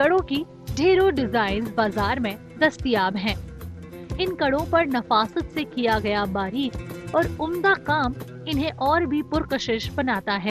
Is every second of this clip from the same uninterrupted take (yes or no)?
yes